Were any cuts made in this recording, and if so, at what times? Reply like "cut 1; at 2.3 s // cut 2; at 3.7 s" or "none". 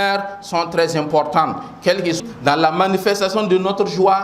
cut 1; at 2.2 s